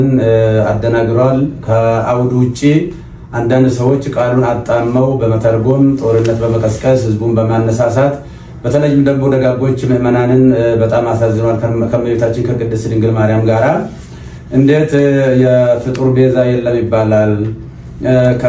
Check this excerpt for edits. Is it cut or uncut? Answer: uncut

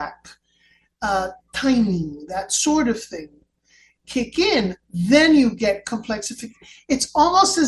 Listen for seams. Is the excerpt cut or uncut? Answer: uncut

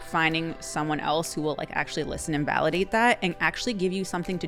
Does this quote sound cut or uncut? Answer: uncut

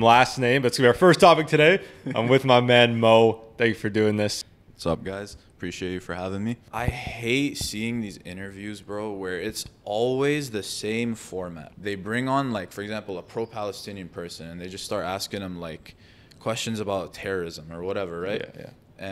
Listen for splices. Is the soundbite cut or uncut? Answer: cut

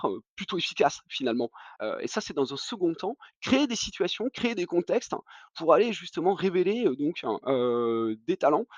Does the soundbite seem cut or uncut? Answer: cut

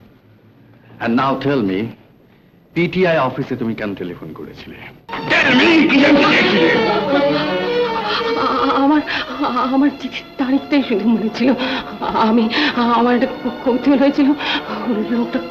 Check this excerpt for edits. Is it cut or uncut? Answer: cut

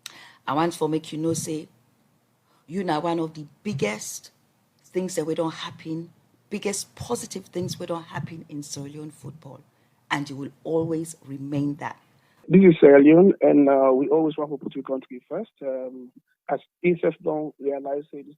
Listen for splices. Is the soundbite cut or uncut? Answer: cut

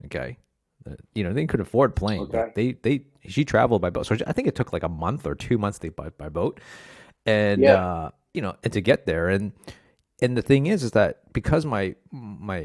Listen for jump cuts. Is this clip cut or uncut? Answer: uncut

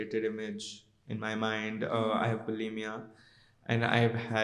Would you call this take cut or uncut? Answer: uncut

